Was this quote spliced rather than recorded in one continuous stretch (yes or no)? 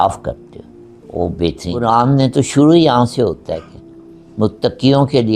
yes